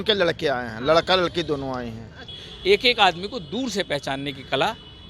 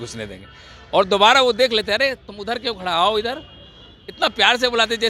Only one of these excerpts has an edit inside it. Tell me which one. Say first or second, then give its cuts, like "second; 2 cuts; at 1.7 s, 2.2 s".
first; 1 cut; at 2.5 s